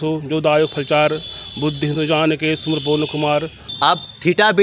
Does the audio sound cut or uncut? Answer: cut